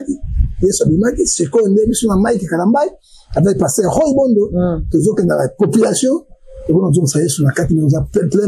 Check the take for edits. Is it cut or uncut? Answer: uncut